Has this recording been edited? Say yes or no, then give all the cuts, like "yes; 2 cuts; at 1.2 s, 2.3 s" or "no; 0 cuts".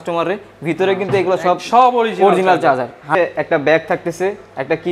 yes; 1 cut; at 3.1 s